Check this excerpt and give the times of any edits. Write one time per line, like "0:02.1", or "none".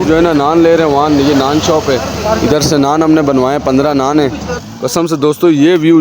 0:04.4